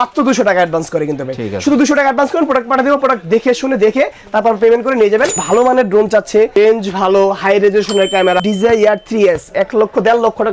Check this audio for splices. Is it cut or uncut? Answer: cut